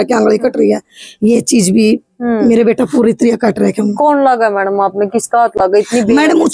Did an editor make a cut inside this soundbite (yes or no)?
no